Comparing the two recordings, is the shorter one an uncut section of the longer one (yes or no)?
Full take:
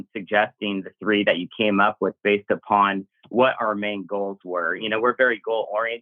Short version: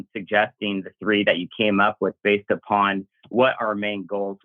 yes